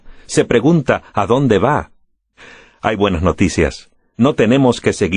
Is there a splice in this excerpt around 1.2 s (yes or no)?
no